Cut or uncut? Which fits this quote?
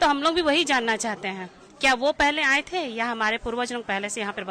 uncut